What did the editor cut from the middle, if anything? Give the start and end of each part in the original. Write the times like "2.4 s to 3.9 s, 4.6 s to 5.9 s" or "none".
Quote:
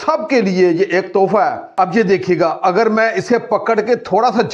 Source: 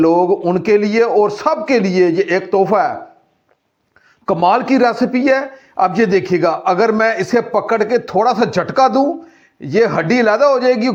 3.0 s to 5.7 s